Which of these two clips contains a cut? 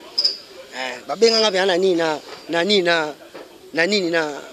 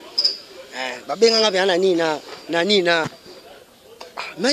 second; 1 cut; at 3.2 s

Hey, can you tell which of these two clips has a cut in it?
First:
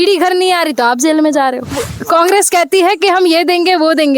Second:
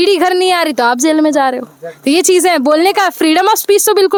first; 1 cut; at 1.9 s

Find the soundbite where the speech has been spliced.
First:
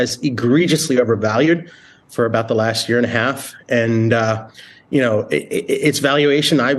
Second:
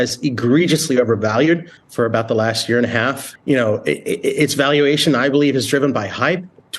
second; 2 cuts; at 1.8 s, 3.3 s

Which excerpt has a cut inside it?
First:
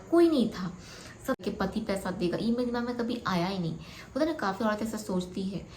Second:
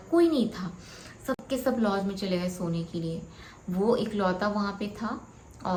first; 1 cut; at 1.4 s

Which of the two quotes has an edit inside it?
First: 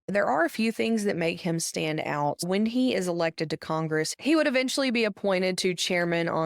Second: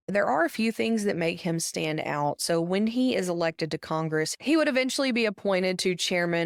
first; 1 cut; at 2.4 s

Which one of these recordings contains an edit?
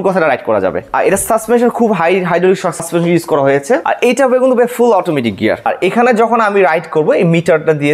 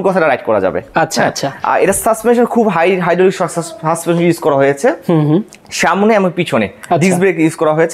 first; 4 cuts; at 0.8 s, 2.8 s, 3.8 s, 5.7 s

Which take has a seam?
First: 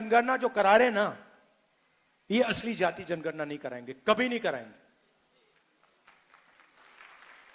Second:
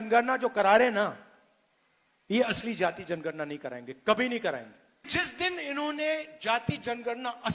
second; 1 cut; at 5.1 s

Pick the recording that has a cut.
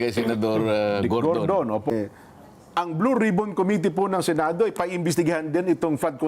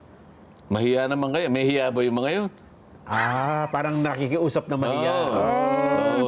first; 1 cut; at 1.9 s

